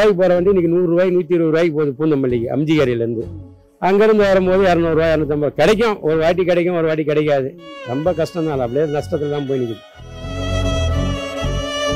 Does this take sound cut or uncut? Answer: cut